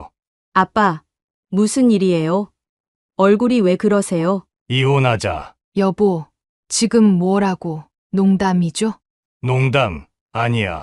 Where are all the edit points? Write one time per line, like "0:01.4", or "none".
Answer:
0:04.5
0:05.5